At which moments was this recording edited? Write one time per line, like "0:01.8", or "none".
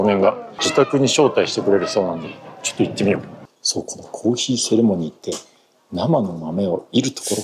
0:03.4